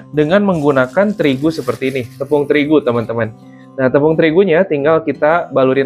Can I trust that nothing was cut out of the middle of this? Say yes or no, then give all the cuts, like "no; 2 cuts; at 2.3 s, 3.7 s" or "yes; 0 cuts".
yes; 0 cuts